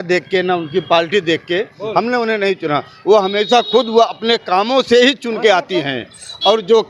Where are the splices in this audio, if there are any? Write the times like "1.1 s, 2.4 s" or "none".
none